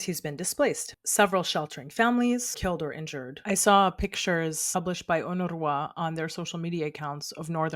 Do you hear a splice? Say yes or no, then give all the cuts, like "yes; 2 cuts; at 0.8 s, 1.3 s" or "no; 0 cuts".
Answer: yes; 3 cuts; at 0.9 s, 2.9 s, 4.6 s